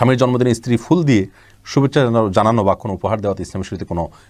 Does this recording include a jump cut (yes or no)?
no